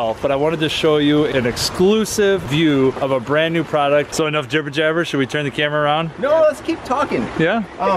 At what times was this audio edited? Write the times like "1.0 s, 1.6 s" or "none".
4.1 s